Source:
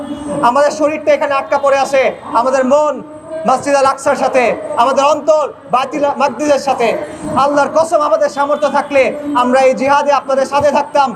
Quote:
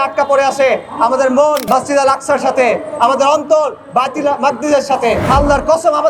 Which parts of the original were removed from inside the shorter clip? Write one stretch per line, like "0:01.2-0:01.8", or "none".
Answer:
0:03.0-0:03.4
0:07.0-0:07.3